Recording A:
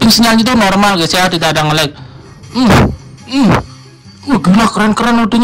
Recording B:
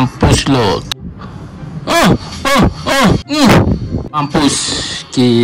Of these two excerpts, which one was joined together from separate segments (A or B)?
B